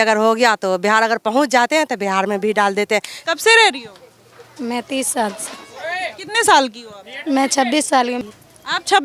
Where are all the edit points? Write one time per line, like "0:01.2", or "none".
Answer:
0:03.1
0:08.2